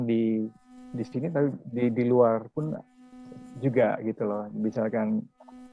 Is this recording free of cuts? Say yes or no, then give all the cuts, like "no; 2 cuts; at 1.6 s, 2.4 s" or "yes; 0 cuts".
yes; 0 cuts